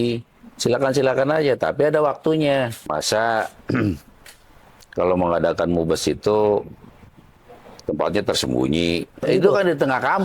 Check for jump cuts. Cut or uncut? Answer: cut